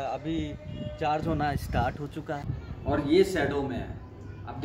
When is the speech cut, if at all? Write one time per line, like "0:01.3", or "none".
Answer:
0:02.6

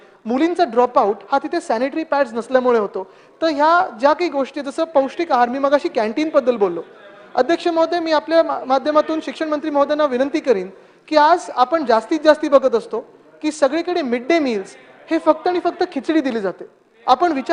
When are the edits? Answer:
none

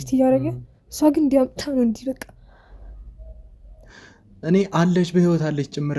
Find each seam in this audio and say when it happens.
0:03.9

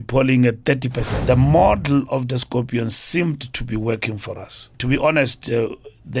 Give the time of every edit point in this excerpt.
0:01.1
0:04.7

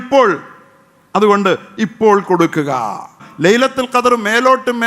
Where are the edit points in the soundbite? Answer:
0:03.2

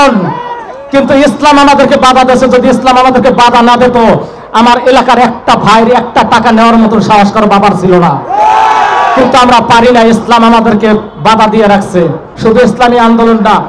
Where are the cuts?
0:12.3

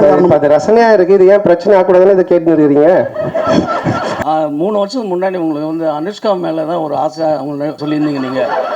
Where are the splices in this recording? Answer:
0:04.2
0:07.8

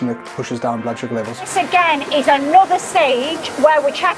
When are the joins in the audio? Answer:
0:01.5

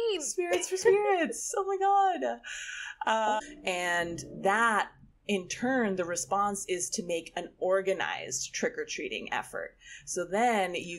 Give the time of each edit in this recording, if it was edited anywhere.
0:03.4

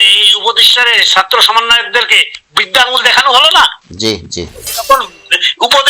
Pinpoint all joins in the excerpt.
0:04.7

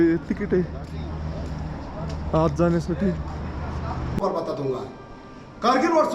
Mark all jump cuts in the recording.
0:04.2

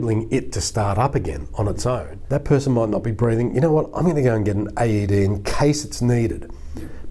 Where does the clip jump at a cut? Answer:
0:02.1

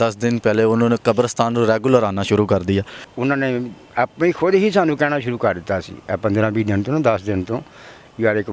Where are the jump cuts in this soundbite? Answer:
0:03.0

